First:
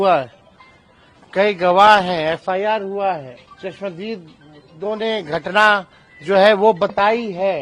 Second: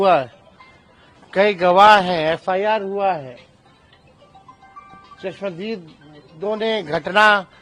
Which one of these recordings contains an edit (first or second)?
first